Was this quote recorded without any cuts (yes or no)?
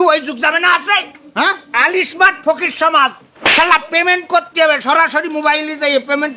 yes